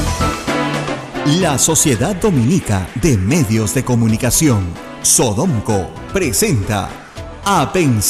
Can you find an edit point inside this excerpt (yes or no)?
yes